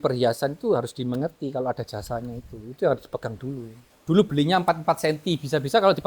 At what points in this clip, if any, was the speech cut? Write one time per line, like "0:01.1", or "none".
0:03.9

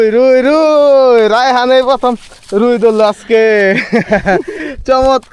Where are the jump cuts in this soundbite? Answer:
none

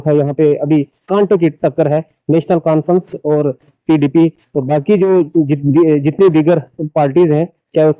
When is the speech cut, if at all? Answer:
none

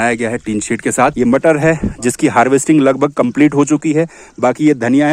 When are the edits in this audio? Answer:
0:01.1

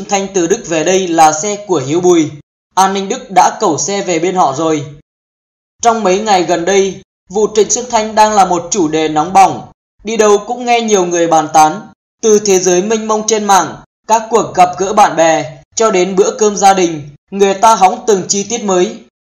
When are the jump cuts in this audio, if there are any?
0:18.2

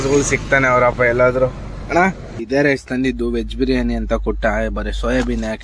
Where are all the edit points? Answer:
0:02.3

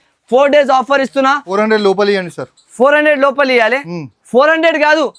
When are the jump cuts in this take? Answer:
0:01.5

